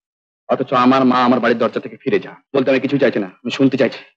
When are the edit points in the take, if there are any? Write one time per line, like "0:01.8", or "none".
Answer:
0:02.4